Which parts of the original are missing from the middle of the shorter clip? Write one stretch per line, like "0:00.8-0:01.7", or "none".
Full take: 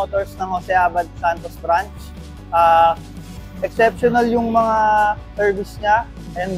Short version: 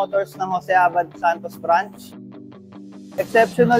0:02.5-0:03.0